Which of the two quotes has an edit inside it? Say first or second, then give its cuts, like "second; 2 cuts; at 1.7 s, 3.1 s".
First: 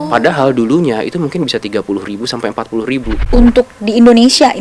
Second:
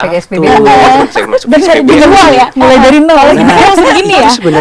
first; 1 cut; at 3.2 s